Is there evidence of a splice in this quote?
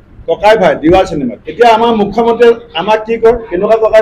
yes; 1 cut; at 1.3 s

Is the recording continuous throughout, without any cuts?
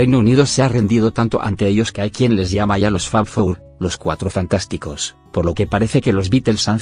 no; 1 cut; at 3.7 s

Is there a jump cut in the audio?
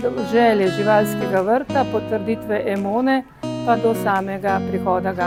no; 0 cuts

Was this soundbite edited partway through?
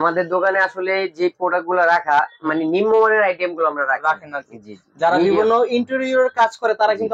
no; 0 cuts

